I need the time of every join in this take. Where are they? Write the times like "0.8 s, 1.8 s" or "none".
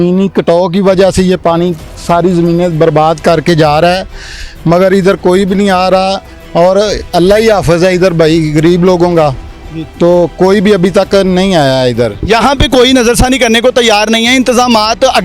none

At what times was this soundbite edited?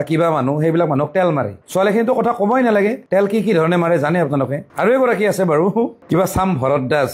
none

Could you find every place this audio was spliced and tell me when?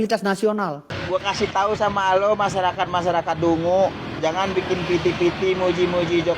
1.0 s

